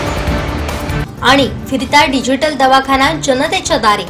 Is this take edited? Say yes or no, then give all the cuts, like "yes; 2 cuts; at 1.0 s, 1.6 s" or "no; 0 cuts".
no; 0 cuts